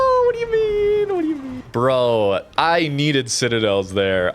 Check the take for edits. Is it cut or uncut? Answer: cut